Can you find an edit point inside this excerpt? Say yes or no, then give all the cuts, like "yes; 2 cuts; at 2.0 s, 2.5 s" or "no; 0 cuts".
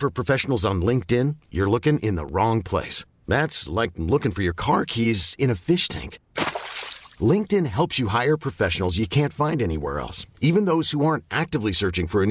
no; 0 cuts